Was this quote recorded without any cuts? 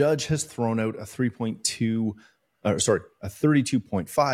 yes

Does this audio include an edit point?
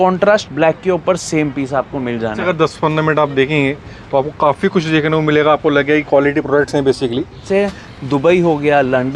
yes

